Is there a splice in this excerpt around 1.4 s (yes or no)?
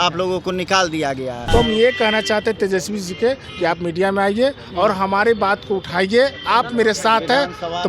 yes